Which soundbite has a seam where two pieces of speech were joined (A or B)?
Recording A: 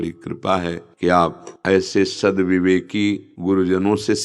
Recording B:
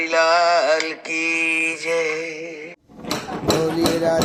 A